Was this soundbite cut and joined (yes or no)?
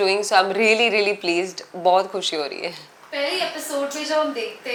no